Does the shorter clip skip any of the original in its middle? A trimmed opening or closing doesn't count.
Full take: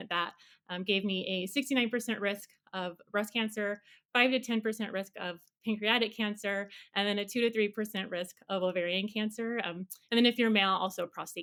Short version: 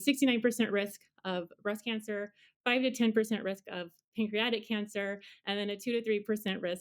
no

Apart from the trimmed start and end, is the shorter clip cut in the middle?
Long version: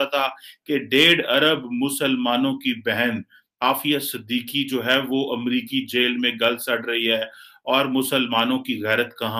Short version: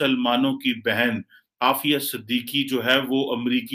no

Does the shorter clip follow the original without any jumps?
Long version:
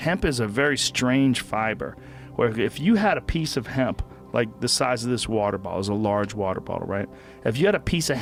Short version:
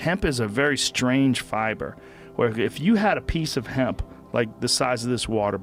yes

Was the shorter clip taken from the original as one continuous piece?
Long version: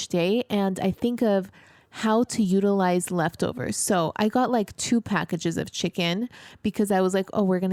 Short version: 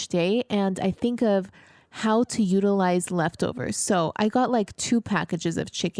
yes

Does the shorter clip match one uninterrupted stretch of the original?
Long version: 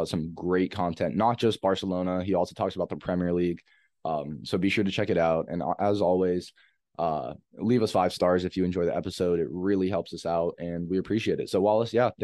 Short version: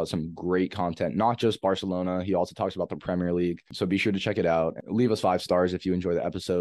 no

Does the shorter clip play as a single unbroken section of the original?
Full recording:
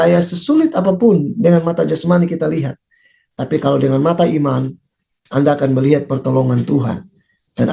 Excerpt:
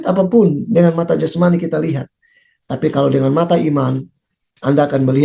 yes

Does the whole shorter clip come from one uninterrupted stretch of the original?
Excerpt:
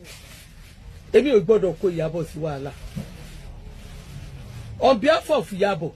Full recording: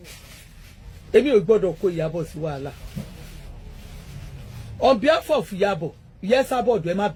yes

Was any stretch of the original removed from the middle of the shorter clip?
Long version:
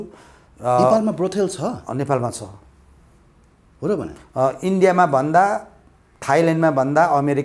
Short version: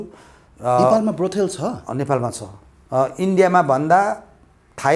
yes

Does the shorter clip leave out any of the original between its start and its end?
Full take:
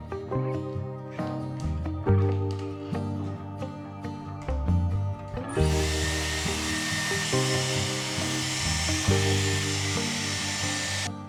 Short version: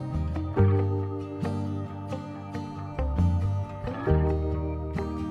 no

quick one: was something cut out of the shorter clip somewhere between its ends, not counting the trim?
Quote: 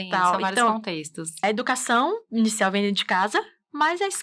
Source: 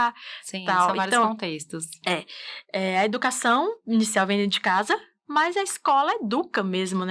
yes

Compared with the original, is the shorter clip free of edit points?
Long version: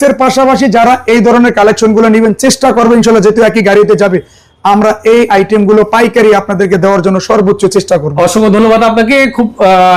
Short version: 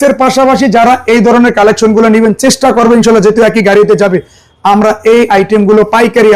yes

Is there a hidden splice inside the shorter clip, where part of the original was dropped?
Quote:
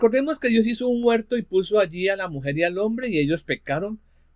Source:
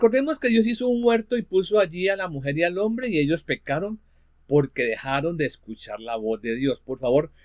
no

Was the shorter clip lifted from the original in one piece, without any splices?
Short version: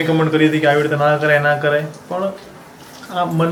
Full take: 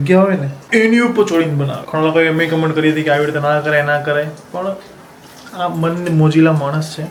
yes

